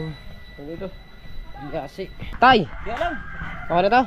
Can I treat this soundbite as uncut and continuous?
no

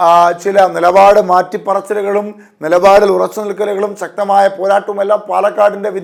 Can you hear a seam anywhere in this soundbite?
no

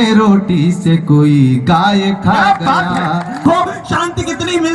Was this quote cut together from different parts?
yes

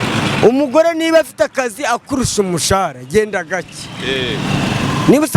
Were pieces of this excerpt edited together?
no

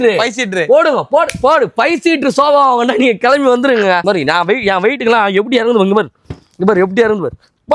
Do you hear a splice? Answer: yes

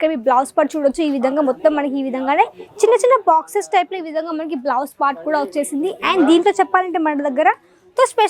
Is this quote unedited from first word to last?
yes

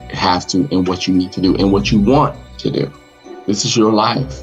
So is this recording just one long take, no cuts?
no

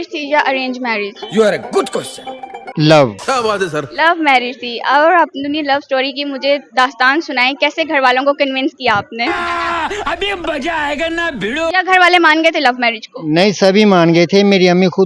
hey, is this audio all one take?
yes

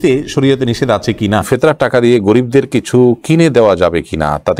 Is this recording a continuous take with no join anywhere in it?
no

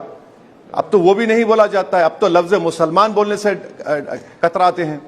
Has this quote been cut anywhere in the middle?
no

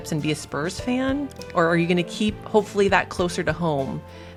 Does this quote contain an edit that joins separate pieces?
no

